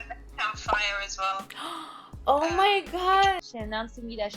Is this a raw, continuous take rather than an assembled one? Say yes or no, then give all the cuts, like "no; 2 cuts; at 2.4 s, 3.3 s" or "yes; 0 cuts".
no; 1 cut; at 3.4 s